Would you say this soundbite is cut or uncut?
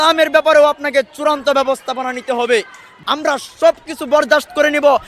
cut